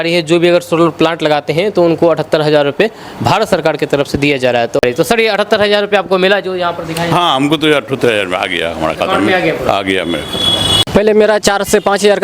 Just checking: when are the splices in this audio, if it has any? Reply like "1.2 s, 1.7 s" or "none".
4.8 s, 10.7 s